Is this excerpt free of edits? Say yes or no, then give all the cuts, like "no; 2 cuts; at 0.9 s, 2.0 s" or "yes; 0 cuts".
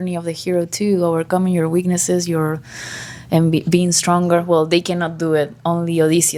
yes; 0 cuts